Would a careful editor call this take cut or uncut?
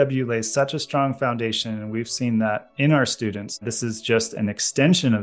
cut